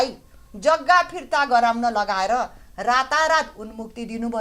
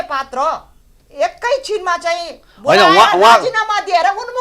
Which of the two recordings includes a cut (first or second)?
second